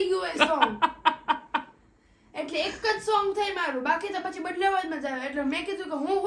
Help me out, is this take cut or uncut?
uncut